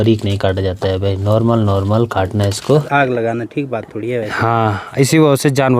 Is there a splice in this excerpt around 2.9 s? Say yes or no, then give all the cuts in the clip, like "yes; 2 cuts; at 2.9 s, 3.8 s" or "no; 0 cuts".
yes; 1 cut; at 2.9 s